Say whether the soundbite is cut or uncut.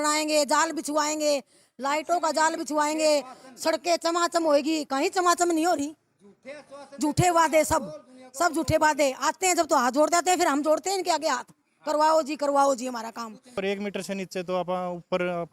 cut